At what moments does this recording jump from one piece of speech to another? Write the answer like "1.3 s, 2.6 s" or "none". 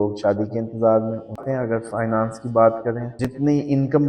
1.3 s